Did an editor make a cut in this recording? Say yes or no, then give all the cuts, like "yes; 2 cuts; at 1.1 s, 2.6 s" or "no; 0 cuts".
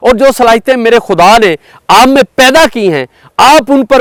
no; 0 cuts